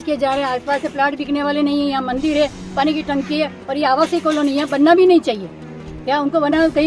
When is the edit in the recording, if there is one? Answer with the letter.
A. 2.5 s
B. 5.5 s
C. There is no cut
C